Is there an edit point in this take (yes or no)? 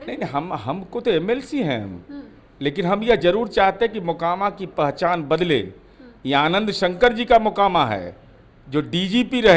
no